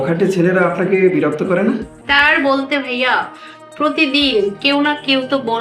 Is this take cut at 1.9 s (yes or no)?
yes